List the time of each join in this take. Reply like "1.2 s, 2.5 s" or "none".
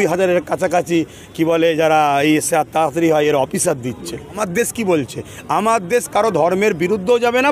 4.4 s